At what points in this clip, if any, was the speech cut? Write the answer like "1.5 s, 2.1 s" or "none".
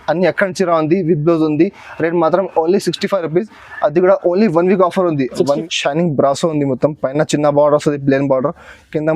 5.6 s